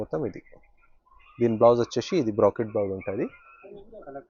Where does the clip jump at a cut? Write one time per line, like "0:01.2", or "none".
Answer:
none

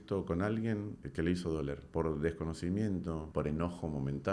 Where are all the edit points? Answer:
0:01.0
0:01.8
0:03.2

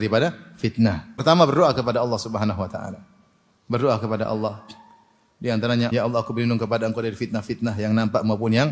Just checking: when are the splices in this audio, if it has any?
0:01.1
0:05.9

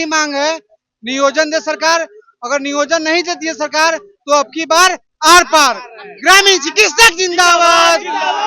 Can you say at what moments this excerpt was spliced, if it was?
none

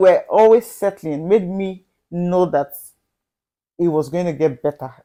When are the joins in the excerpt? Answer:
none

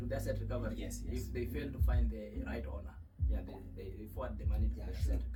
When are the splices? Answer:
none

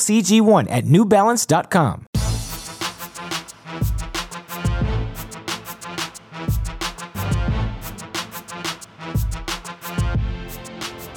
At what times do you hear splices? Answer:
0:02.1
0:04.4
0:06.9

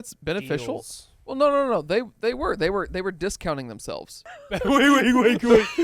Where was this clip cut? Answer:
0:04.2

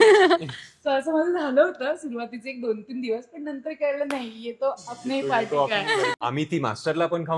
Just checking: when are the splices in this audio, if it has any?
0:06.1

